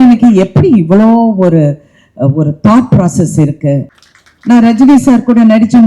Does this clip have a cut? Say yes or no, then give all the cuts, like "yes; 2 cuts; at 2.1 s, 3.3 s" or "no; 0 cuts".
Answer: yes; 1 cut; at 3.9 s